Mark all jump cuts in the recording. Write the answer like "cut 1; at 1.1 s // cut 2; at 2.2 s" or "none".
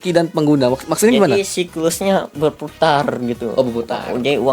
none